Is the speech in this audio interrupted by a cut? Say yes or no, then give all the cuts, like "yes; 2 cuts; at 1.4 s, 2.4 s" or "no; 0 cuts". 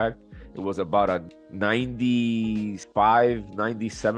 yes; 2 cuts; at 1.3 s, 2.8 s